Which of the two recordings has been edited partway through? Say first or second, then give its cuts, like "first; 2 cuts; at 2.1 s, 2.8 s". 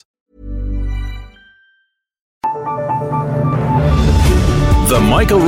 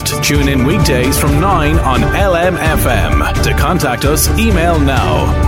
first; 1 cut; at 2.3 s